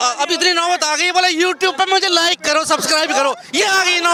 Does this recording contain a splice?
no; 0 cuts

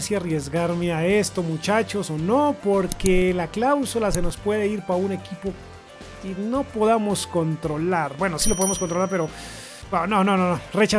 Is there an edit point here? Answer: no; 0 cuts

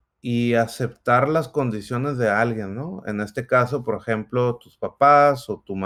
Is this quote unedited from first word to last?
yes; 0 cuts

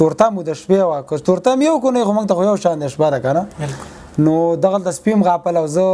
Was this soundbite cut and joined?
no; 0 cuts

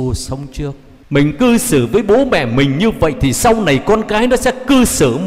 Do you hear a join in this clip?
yes; 1 cut; at 0.9 s

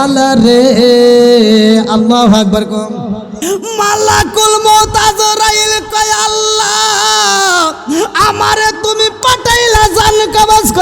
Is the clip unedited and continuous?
no; 1 cut; at 3.4 s

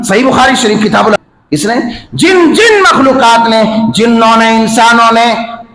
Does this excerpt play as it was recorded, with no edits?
no; 1 cut; at 1.2 s

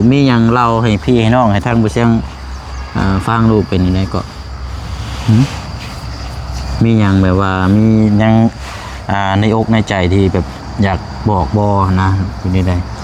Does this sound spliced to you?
no; 0 cuts

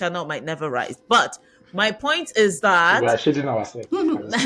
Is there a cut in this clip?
no; 0 cuts

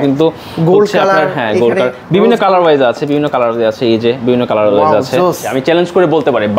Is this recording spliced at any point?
yes; 1 cut; at 5.4 s

